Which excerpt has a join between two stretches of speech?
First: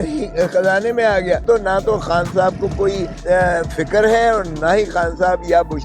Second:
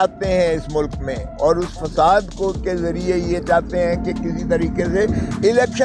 first; 2 cuts; at 1.4 s, 3.1 s

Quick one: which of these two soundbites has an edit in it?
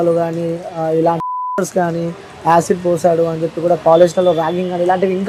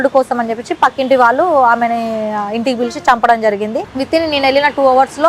second; 1 cut; at 3.9 s

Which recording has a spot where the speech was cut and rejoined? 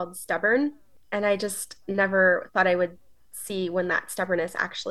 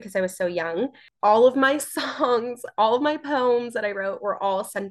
second; 1 cut; at 1.0 s

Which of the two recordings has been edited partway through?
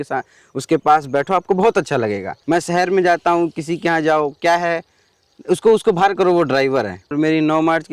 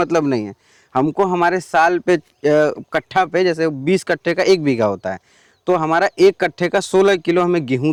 first; 2 cuts; at 2.3 s, 7.1 s

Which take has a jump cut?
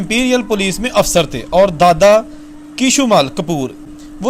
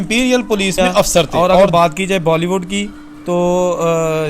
second; 1 cut; at 1.7 s

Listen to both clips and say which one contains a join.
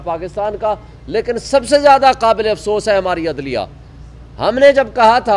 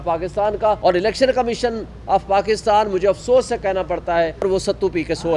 second; 2 cuts; at 0.8 s, 4.4 s

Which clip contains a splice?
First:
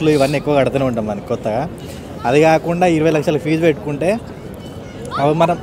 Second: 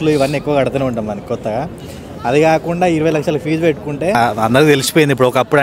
second; 1 cut; at 4.2 s

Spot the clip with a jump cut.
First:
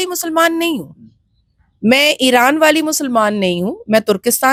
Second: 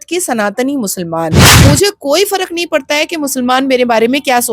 second; 1 cut; at 1.6 s

